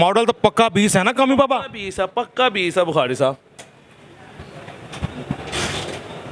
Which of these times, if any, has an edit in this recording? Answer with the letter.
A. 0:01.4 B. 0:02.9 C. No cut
C